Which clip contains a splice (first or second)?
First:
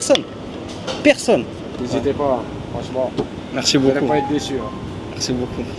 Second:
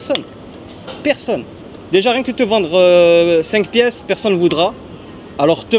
first